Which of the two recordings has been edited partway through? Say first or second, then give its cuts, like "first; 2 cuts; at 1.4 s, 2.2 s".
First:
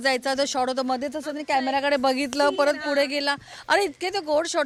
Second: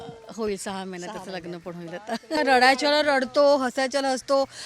second; 1 cut; at 2.4 s